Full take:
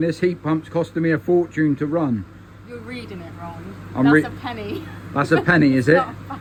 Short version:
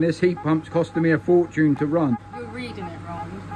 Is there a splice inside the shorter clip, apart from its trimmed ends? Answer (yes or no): yes